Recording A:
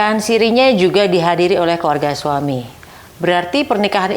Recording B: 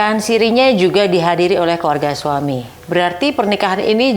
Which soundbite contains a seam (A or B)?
B